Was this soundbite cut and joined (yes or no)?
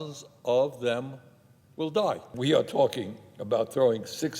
yes